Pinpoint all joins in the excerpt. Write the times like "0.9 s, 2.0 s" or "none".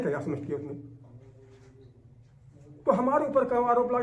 none